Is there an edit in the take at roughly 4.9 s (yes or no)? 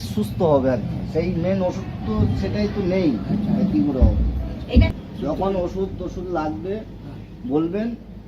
yes